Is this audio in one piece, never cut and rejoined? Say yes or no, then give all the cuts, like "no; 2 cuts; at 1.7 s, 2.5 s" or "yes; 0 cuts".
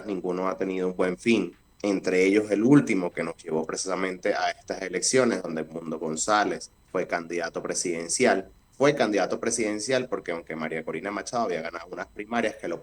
no; 3 cuts; at 1.6 s, 6.7 s, 8.6 s